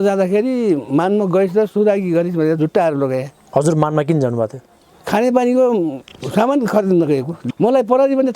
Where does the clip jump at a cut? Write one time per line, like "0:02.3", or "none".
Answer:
0:03.4
0:07.4